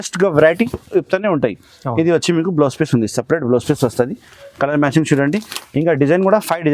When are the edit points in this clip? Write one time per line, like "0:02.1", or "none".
none